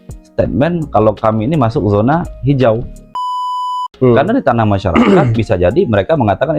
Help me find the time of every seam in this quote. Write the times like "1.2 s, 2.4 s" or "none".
3.4 s